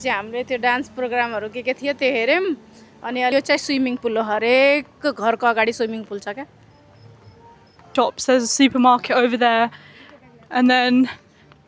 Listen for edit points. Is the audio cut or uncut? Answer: cut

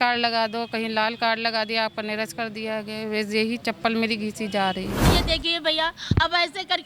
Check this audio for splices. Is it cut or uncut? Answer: cut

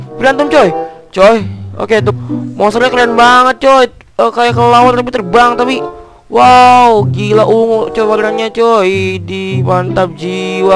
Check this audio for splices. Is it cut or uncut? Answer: cut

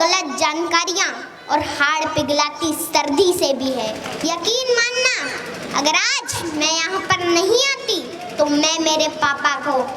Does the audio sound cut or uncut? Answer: cut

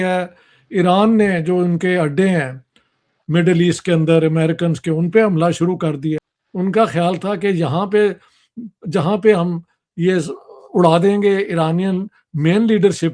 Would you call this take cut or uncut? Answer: cut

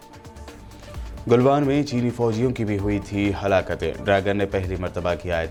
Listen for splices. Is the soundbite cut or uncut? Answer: uncut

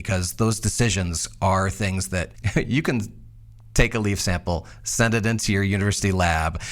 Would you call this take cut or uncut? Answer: cut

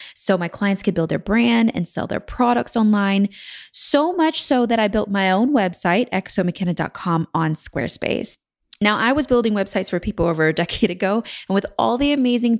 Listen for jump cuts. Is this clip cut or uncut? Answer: uncut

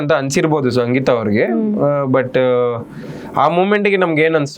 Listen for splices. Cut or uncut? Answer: uncut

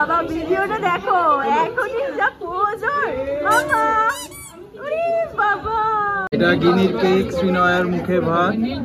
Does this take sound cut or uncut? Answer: cut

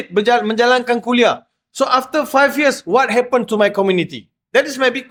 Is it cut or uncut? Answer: uncut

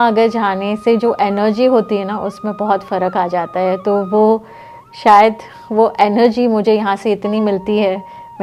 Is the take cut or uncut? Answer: uncut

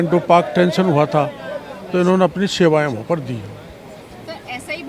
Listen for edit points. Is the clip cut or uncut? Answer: uncut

